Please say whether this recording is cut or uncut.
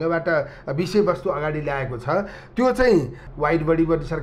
cut